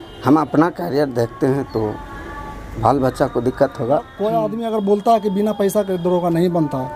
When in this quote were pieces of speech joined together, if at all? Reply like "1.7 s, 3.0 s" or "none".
4.2 s

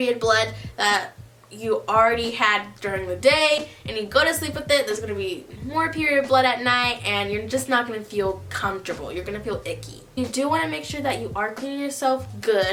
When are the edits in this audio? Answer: none

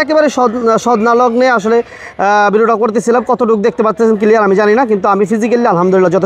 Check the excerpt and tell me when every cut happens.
none

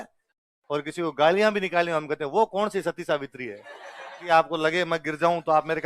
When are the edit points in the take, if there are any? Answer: 4.2 s

